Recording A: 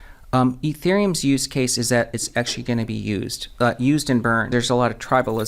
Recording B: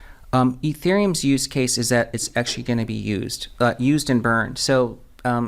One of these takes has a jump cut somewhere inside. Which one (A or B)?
A